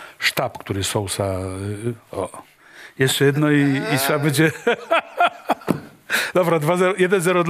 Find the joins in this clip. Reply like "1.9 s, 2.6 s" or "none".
none